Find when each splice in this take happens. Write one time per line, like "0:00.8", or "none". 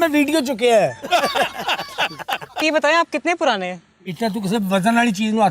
0:02.6

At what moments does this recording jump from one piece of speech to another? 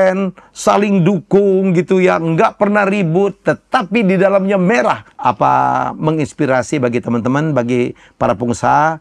0:05.1

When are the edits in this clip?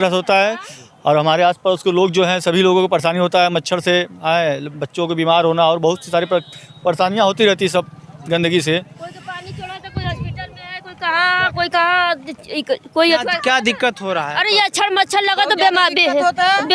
none

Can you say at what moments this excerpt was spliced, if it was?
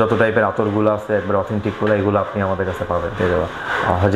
none

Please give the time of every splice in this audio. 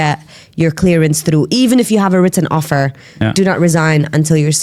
none

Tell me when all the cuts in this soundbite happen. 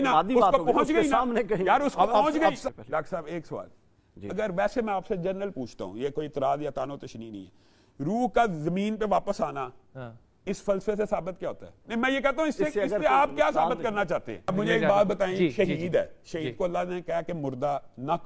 0:02.6
0:11.7
0:14.5

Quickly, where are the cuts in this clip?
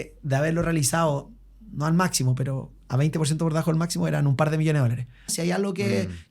0:05.3

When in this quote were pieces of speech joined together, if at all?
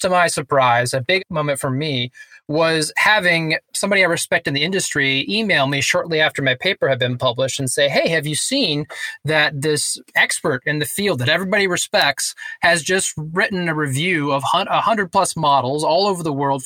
0:01.2

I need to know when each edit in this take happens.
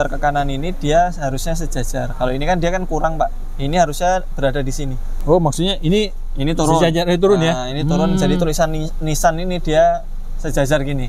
none

